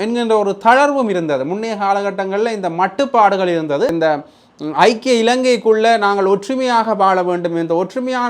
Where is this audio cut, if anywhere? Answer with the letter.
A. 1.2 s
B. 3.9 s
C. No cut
B